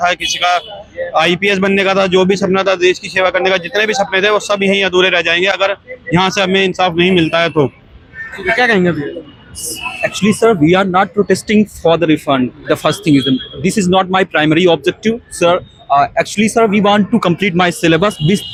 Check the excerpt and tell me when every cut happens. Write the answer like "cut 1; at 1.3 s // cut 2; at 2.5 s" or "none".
none